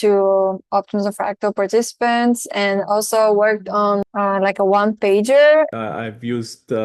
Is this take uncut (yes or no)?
no